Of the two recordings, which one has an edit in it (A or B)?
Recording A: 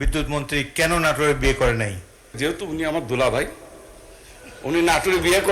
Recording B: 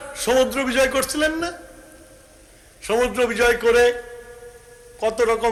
A